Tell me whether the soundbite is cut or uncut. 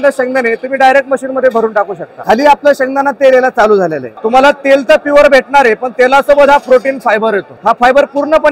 cut